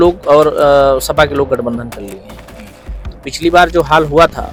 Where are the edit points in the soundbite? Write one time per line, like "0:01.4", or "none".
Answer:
none

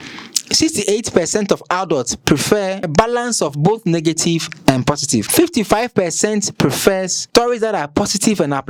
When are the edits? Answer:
none

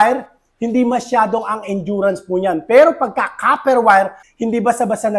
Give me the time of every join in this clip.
0:04.2

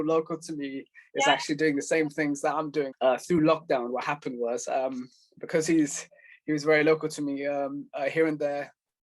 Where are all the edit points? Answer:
none

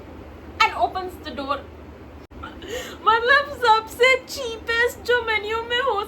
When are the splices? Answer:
0:02.2

